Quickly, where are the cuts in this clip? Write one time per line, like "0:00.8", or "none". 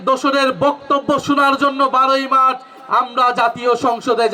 none